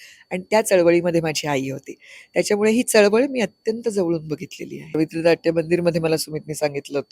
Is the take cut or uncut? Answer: cut